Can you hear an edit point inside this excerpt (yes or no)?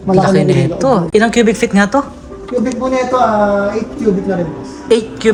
no